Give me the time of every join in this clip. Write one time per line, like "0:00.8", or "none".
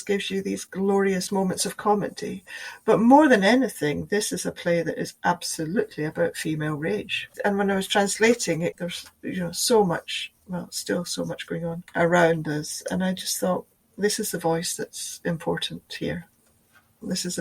0:01.3
0:07.3
0:11.8